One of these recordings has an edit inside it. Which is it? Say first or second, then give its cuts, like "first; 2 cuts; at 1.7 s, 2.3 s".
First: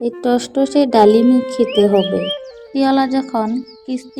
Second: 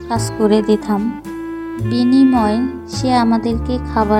first; 1 cut; at 2.7 s